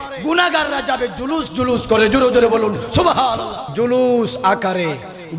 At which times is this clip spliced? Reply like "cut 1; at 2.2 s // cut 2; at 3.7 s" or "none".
cut 1; at 3.6 s

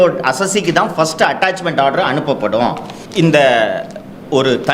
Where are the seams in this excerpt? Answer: cut 1; at 2.9 s

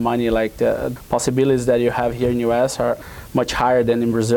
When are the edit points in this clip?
none

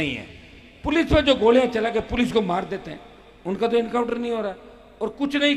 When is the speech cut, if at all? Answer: none

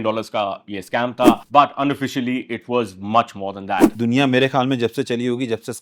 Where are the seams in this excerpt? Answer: cut 1; at 1.4 s // cut 2; at 3.9 s

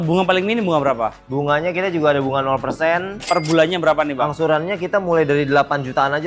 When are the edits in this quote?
cut 1; at 3.2 s

